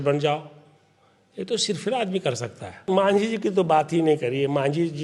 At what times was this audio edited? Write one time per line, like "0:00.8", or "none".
0:02.8